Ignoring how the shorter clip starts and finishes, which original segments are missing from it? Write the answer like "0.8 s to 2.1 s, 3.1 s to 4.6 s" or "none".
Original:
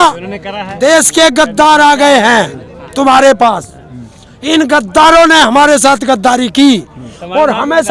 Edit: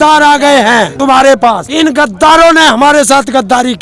2.5 s to 2.9 s, 3.6 s to 4.4 s